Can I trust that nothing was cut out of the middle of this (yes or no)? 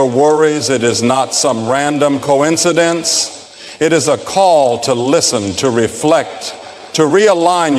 yes